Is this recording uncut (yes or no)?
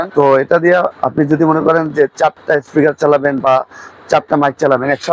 no